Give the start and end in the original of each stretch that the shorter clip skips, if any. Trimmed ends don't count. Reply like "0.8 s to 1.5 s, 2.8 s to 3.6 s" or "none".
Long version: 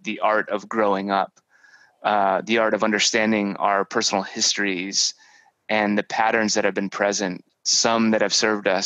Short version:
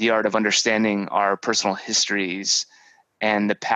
none